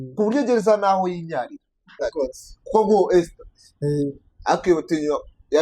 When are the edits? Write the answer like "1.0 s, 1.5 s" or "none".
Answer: 2.0 s